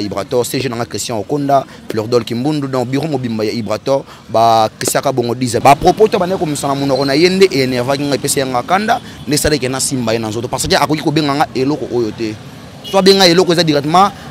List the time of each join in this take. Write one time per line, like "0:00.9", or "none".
0:05.6